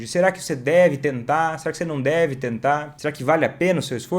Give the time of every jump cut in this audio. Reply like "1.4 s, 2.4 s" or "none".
2.9 s